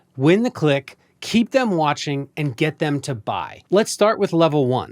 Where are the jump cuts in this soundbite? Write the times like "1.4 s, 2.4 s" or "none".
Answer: 3.5 s